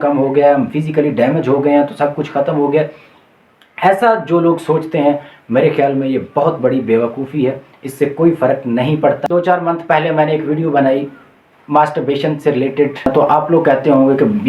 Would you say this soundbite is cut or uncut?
cut